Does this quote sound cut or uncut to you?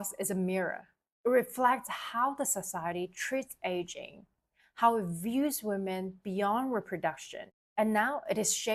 cut